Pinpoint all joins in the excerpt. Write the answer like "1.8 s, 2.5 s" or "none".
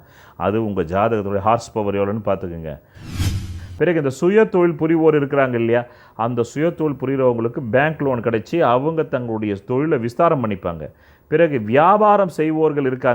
3.2 s